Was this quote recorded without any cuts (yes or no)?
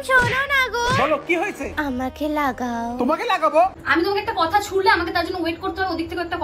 no